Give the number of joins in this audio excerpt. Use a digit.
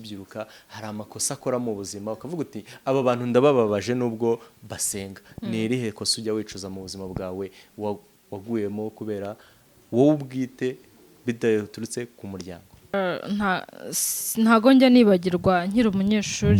1